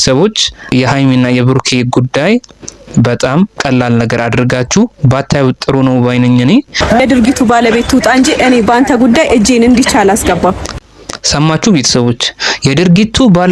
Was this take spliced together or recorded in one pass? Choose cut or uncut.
cut